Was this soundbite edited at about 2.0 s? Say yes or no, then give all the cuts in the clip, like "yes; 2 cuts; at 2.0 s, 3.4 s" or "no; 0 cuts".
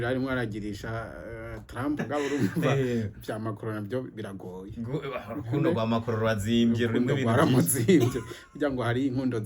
yes; 1 cut; at 2.0 s